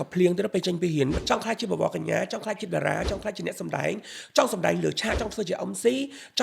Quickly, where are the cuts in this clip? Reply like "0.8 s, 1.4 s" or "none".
1.2 s